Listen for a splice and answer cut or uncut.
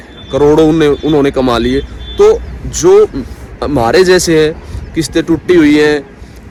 uncut